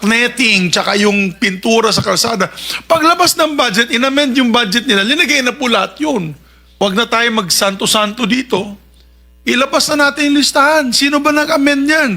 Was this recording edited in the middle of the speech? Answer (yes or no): yes